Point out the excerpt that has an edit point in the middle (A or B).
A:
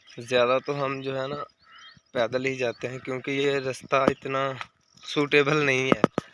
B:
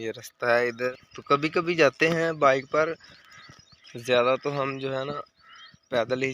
B